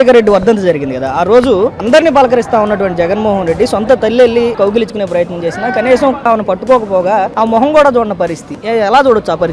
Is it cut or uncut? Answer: cut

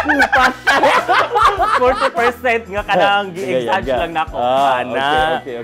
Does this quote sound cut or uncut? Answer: uncut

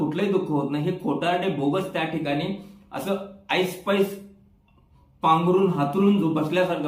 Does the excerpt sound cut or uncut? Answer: uncut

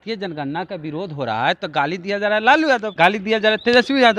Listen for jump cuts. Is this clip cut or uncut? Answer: cut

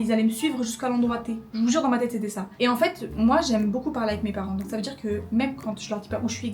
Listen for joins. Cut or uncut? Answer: uncut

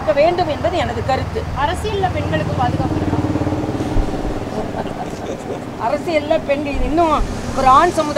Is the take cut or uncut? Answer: uncut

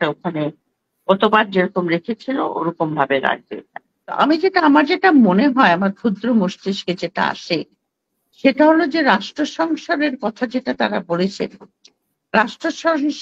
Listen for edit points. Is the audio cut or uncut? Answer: cut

